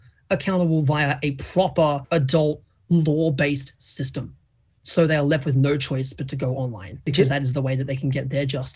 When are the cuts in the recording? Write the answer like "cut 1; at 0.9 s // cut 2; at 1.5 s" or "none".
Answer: cut 1; at 7.1 s